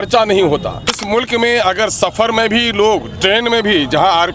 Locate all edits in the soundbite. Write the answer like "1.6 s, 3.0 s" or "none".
1.0 s